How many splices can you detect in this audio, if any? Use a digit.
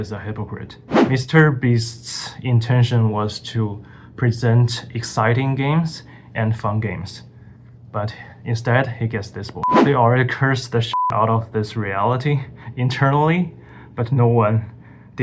2